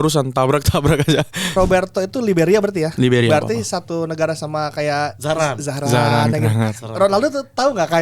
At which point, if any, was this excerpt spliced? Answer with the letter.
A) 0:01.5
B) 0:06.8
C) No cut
A